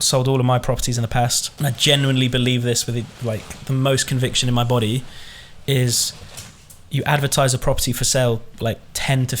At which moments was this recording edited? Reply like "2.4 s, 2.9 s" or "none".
1.4 s